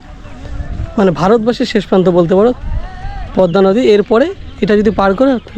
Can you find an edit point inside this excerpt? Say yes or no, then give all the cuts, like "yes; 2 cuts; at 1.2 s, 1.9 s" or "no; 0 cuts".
no; 0 cuts